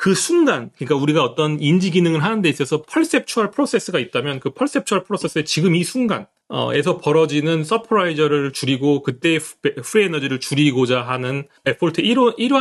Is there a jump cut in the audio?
yes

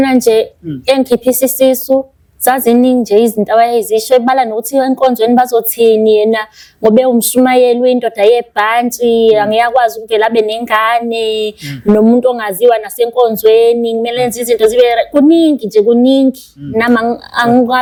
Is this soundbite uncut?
yes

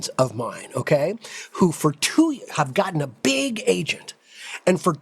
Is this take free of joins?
yes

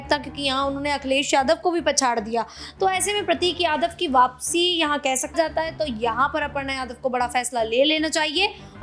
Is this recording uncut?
no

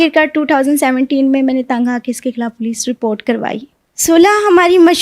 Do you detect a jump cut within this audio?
yes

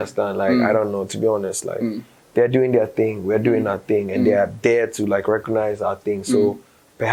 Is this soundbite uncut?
yes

